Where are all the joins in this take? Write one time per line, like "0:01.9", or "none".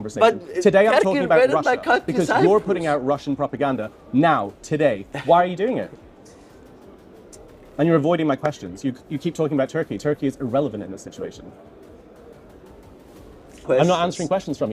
0:13.6